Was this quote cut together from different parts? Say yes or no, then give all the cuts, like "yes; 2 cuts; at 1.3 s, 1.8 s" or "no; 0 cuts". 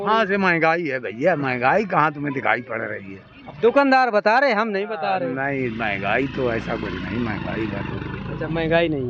no; 0 cuts